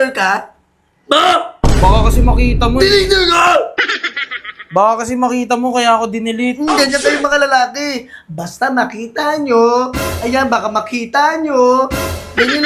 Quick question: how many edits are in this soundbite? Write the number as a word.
zero